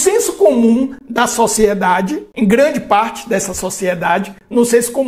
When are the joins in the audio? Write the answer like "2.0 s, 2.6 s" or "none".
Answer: 2.2 s